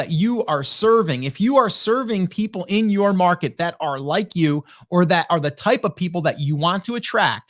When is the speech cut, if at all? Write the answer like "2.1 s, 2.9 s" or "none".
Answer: none